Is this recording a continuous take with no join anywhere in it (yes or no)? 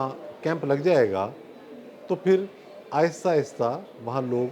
yes